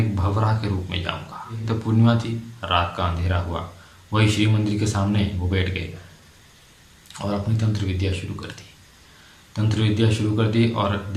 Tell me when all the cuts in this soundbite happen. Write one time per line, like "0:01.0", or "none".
0:01.6

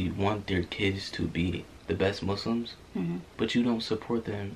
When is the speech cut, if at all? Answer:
0:03.2

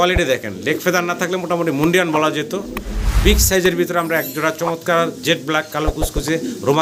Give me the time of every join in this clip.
none

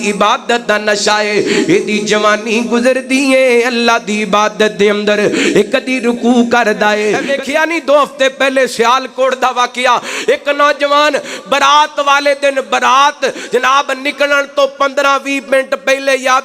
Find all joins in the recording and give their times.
0:07.2

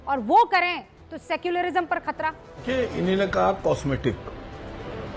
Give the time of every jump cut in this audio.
0:02.6

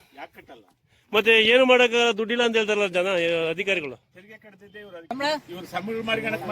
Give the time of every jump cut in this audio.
0:05.1

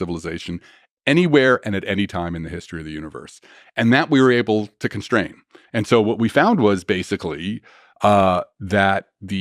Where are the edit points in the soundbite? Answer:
none

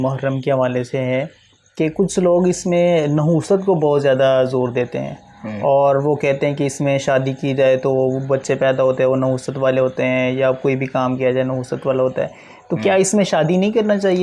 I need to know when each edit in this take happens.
none

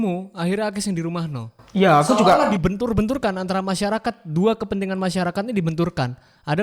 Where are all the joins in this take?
none

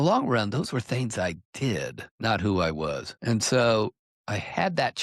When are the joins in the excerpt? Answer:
0:02.0
0:03.1

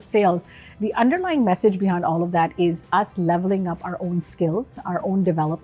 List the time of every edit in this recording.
none

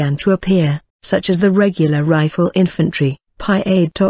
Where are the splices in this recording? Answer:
0:02.3

